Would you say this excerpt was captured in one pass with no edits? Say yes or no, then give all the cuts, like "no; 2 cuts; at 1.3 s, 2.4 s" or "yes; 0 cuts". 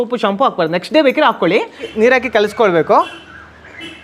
no; 1 cut; at 1.9 s